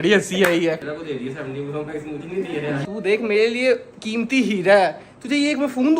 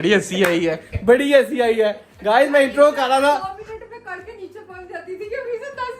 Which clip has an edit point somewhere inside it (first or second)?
first